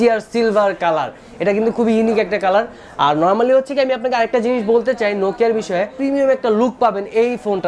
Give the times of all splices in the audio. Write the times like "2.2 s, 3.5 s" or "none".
5.9 s